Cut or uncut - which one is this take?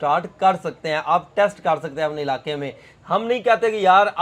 uncut